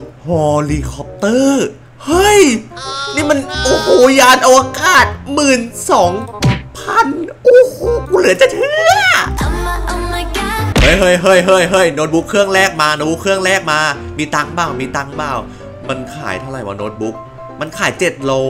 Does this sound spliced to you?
yes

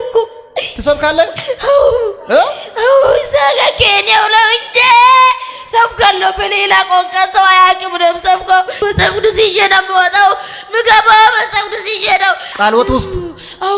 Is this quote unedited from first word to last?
no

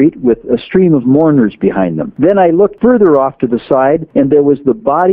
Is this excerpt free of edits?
no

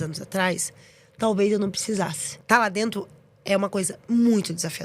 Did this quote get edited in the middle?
yes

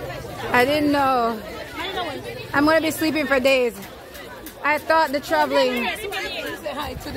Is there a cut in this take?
no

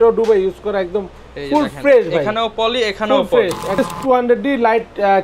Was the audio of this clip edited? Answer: yes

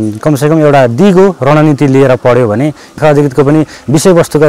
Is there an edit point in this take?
yes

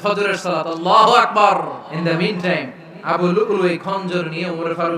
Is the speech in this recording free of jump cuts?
no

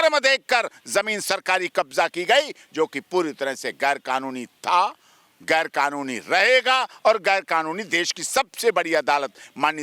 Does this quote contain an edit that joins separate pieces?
no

